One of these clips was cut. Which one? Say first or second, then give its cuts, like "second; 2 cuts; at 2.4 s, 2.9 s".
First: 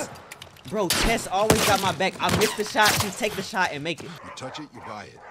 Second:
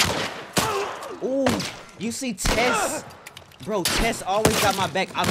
first; 1 cut; at 4.2 s